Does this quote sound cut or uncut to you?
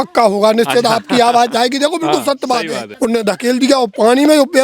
cut